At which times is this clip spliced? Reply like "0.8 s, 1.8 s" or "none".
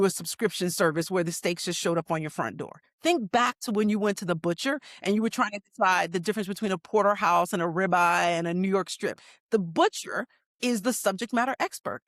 none